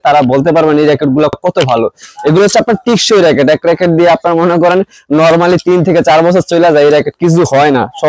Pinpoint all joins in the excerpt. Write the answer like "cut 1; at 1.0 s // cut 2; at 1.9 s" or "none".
none